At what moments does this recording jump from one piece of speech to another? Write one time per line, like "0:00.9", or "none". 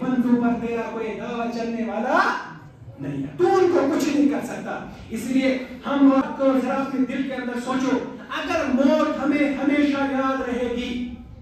0:06.2